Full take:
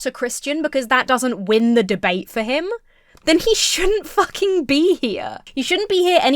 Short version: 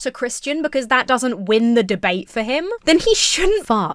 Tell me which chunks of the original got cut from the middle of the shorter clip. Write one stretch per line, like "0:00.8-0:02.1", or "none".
0:02.7-0:03.1